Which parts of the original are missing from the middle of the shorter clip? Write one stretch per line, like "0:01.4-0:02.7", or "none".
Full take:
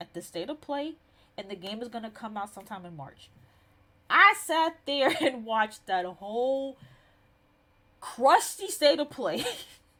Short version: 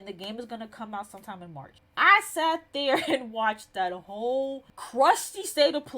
0:03.2-0:03.9
0:06.9-0:08.0